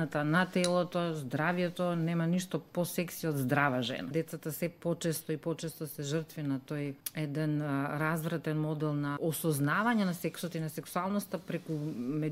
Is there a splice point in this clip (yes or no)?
yes